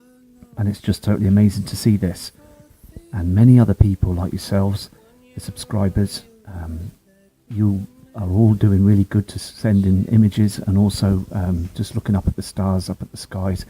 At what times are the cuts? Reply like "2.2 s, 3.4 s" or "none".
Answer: 12.3 s